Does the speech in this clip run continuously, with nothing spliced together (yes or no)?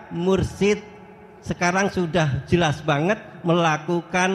yes